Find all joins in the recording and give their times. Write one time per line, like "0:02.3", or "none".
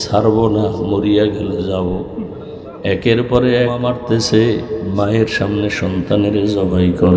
0:03.9